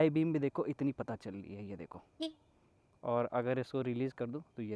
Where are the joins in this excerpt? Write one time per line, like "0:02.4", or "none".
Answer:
none

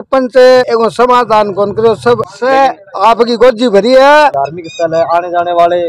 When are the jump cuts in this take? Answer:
0:02.3
0:04.3

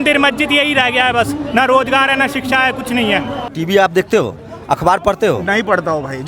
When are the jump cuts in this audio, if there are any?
0:03.5

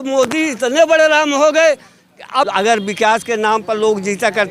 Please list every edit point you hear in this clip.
0:02.5

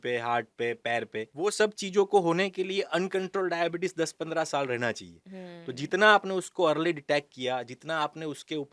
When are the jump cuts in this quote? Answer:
0:01.3

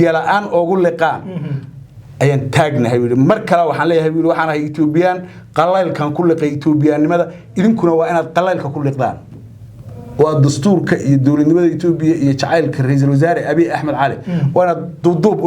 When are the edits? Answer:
none

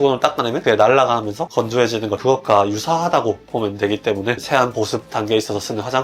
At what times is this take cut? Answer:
none

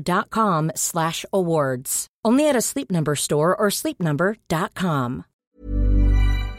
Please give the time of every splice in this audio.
0:05.4

